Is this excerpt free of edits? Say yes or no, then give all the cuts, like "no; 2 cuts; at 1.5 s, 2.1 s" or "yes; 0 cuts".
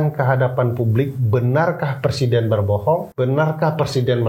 no; 1 cut; at 3.1 s